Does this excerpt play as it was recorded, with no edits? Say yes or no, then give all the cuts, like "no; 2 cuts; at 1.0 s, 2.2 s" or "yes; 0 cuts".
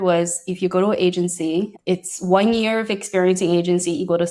no; 1 cut; at 1.7 s